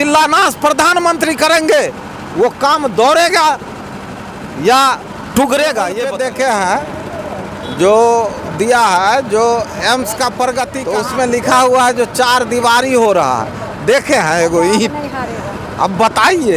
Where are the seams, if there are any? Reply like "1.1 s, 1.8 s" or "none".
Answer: 6.1 s, 10.8 s